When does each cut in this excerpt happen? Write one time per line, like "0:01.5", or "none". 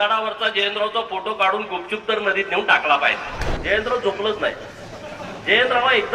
0:03.5